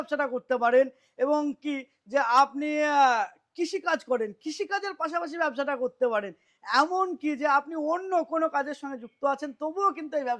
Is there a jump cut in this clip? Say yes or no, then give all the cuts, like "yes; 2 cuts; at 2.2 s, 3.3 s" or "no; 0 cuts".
no; 0 cuts